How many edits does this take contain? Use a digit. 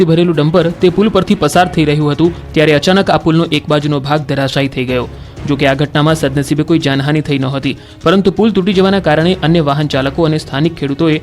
1